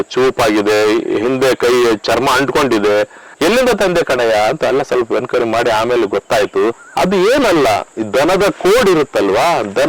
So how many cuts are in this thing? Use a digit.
2